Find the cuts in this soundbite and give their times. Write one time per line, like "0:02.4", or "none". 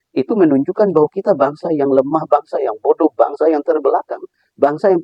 none

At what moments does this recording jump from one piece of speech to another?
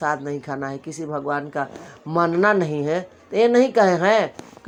none

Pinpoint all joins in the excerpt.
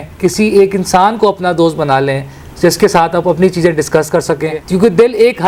0:04.6

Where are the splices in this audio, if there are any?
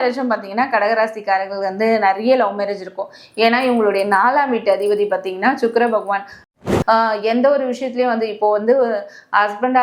0:06.5

